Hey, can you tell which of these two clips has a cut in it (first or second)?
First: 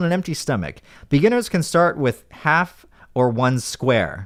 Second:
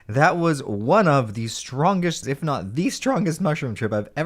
second